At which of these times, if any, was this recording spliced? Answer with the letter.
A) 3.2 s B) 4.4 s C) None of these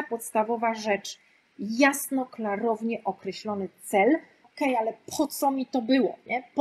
B